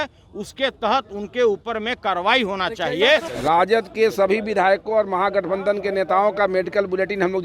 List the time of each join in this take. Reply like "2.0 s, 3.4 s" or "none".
3.3 s